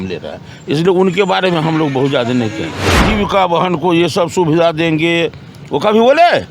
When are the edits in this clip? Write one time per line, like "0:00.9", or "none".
0:02.9